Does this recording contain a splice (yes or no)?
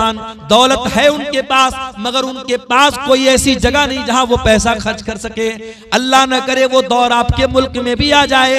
no